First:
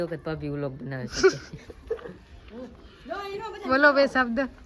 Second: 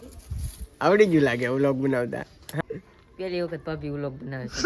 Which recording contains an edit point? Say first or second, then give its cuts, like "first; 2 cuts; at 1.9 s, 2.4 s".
second; 1 cut; at 2.4 s